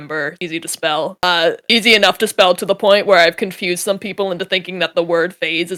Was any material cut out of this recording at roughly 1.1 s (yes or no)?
no